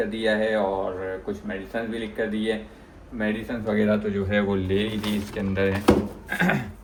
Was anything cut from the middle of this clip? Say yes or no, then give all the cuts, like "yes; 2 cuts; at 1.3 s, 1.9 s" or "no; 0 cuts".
no; 0 cuts